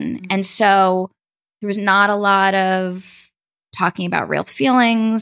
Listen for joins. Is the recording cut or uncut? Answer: uncut